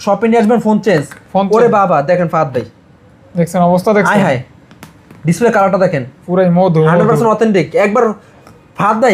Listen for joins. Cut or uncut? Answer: uncut